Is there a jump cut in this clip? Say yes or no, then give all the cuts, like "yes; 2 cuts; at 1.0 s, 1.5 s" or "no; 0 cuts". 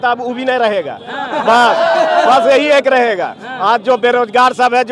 no; 0 cuts